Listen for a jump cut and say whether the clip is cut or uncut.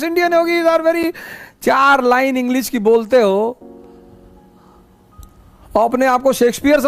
uncut